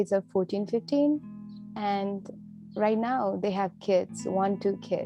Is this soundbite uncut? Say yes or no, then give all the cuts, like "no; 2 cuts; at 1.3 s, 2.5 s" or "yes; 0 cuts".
yes; 0 cuts